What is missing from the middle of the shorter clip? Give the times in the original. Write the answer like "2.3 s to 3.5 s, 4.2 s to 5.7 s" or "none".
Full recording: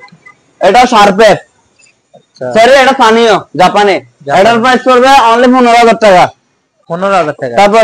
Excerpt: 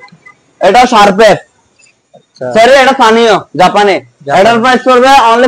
none